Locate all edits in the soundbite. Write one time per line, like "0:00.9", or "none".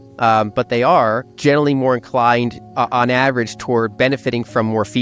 0:01.3